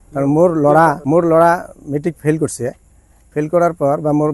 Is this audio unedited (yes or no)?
no